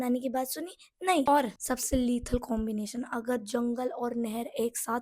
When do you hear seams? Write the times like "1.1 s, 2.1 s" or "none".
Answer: 1.2 s